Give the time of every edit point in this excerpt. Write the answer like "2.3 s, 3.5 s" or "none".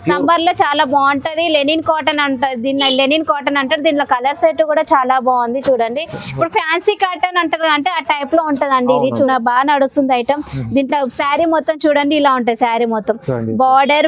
9.3 s

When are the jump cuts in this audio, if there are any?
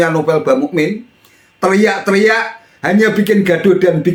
none

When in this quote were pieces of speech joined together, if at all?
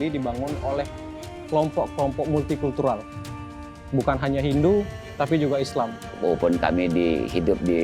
6.1 s

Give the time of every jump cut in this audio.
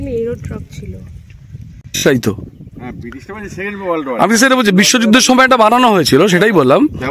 2.0 s

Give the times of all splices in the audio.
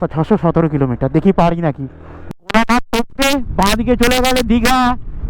2.2 s

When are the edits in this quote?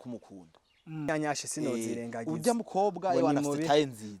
1.1 s

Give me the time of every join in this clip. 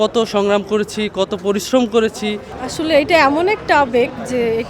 2.5 s

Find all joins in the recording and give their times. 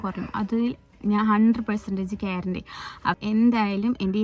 3.2 s

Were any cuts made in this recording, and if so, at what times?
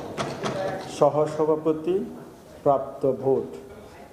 none

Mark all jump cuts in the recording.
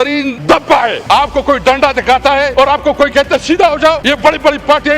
0.8 s, 2.5 s, 4.0 s

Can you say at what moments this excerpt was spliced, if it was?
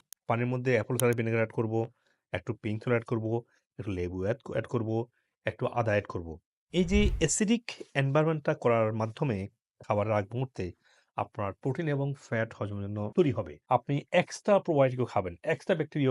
13.6 s

